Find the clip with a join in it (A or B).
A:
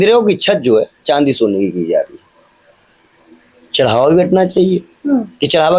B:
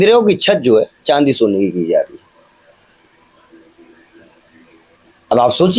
A